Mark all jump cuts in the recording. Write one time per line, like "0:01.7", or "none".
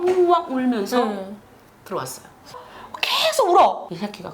0:02.5